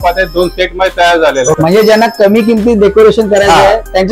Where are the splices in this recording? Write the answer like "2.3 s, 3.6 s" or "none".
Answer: 1.6 s